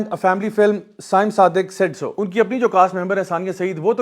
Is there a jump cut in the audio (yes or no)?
yes